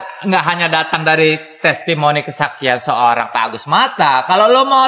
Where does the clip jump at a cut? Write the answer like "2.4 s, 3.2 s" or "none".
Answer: none